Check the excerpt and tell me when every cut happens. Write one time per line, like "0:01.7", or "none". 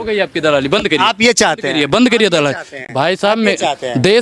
none